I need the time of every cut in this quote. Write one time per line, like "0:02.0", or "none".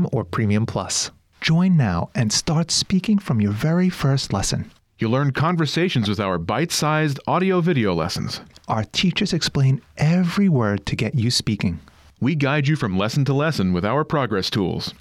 0:01.0